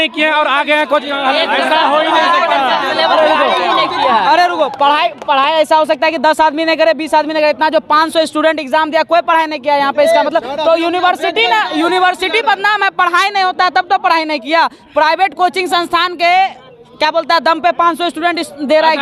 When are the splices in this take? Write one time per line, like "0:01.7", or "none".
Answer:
none